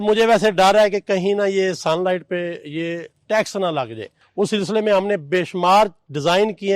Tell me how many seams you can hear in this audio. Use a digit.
1